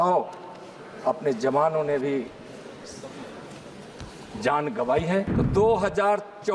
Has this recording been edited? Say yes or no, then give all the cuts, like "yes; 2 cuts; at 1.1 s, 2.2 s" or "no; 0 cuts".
yes; 1 cut; at 5.4 s